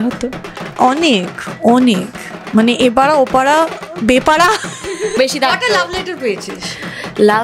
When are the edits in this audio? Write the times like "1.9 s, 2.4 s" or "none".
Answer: 5.2 s